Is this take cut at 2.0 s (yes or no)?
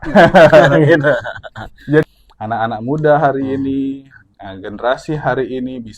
yes